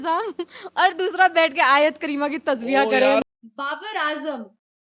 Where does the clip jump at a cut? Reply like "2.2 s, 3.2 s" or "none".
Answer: 3.2 s